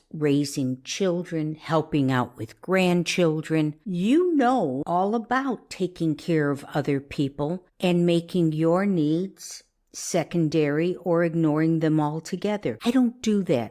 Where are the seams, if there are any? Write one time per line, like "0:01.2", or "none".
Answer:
0:12.7